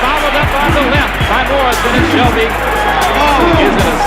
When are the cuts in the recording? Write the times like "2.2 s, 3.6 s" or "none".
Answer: 2.2 s